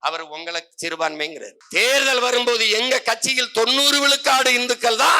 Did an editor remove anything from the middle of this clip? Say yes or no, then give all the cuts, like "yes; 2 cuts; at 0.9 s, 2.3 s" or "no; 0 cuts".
yes; 1 cut; at 1.5 s